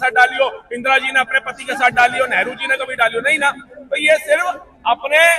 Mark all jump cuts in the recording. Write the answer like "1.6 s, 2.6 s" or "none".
none

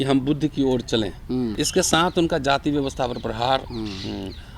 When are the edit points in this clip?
1.6 s

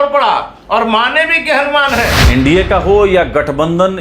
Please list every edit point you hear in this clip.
2.2 s

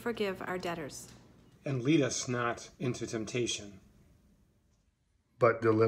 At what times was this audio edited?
4.6 s

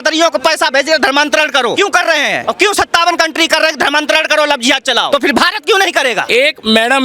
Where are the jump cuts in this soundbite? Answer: 1.9 s, 5.1 s, 6.2 s

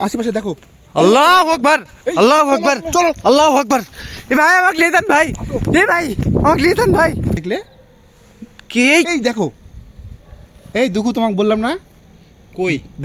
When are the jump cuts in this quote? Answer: 7.4 s

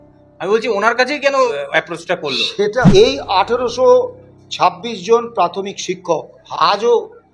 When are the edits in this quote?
1.5 s, 2.8 s, 6.3 s

